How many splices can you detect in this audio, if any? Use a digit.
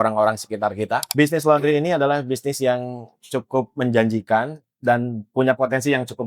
1